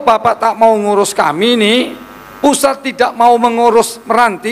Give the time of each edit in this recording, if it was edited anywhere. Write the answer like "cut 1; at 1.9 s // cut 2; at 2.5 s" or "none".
none